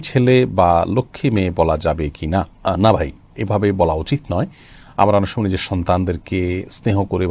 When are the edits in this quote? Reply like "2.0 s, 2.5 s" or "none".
none